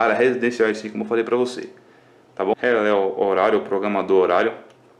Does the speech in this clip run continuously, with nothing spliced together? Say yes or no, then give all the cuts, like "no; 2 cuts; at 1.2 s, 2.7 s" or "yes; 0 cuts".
no; 1 cut; at 2.5 s